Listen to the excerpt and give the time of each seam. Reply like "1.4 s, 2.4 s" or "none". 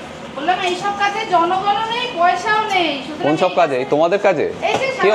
none